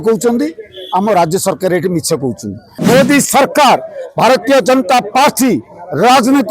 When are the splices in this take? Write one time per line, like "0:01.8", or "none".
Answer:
0:02.7

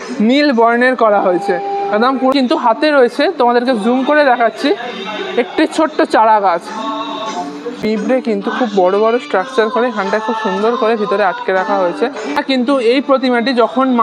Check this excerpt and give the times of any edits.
0:02.3
0:07.7
0:12.4

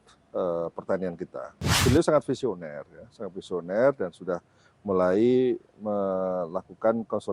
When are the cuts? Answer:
0:01.7

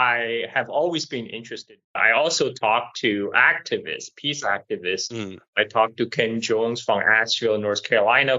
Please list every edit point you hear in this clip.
0:02.0

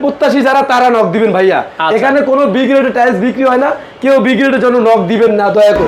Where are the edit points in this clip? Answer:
none

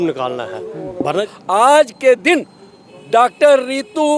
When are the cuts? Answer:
0:01.3

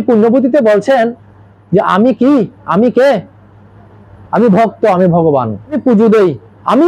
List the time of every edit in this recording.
0:05.8

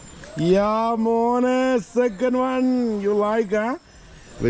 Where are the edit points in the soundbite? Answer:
none

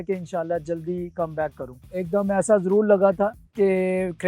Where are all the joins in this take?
0:02.0

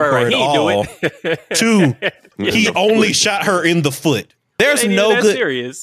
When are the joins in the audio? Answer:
0:02.3
0:04.4

